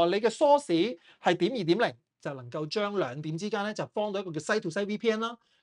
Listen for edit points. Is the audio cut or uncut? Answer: cut